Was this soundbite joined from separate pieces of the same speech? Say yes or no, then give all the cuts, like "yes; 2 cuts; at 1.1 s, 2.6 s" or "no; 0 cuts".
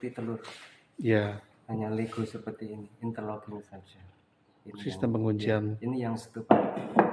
no; 0 cuts